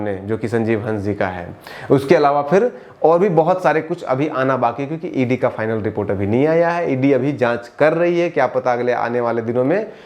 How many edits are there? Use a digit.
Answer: 0